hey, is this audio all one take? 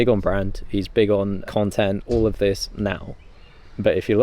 no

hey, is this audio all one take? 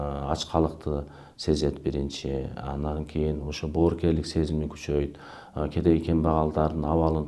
yes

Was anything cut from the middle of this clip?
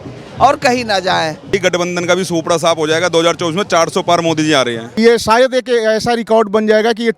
yes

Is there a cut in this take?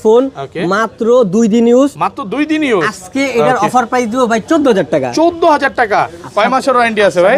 no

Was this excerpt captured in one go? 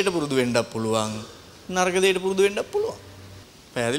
yes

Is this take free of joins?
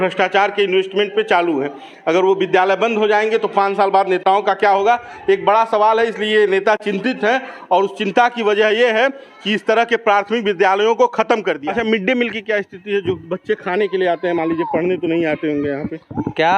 no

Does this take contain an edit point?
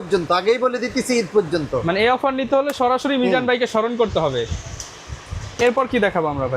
no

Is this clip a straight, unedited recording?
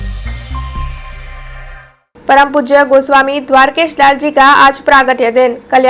no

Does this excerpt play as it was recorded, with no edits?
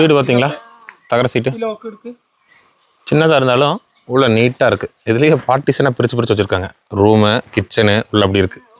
yes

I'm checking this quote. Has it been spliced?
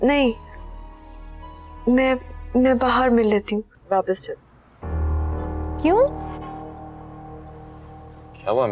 yes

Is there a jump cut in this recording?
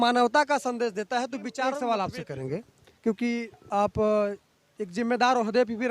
yes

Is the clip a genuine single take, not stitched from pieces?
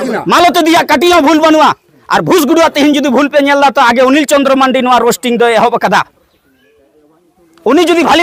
yes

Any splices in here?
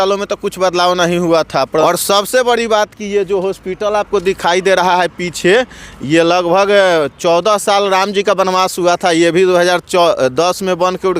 yes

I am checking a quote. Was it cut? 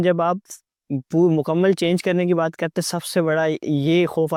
no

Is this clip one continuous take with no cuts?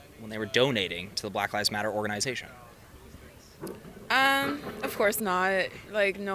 yes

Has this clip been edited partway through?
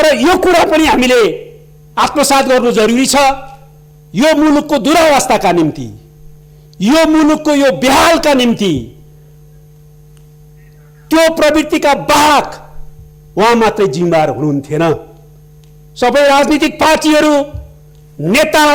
no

